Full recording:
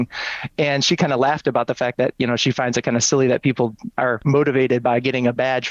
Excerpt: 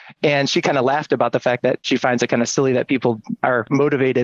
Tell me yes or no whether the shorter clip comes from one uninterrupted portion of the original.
no